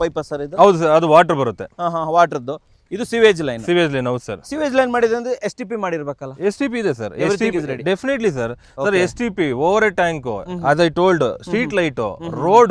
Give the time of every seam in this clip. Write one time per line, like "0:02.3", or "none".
none